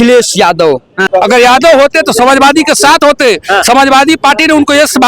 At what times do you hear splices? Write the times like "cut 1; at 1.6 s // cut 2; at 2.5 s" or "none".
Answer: cut 1; at 1.0 s